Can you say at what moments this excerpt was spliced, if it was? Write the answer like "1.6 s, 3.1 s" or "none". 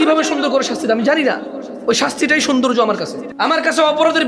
3.2 s